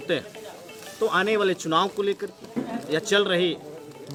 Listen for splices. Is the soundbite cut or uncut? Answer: uncut